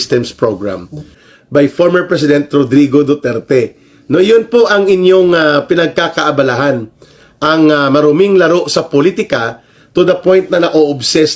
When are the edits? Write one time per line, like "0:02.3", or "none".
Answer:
0:01.1

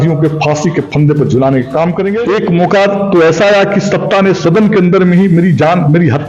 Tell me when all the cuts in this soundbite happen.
0:02.2

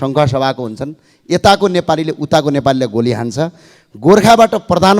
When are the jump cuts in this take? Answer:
none

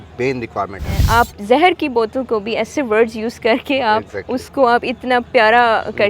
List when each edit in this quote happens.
0:01.0

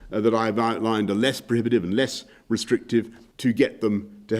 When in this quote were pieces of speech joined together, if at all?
0:03.2

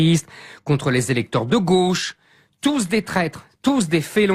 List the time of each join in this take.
0:02.2

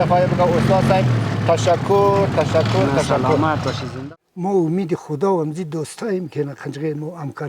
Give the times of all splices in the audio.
0:03.9

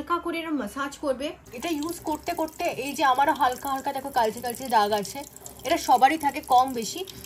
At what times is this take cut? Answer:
0:01.5

